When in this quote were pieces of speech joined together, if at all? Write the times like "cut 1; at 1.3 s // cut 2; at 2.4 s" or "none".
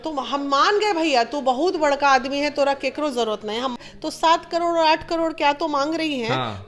cut 1; at 3.8 s